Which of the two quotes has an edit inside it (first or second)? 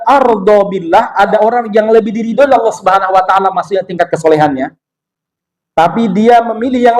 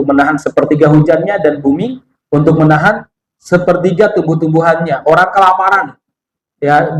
first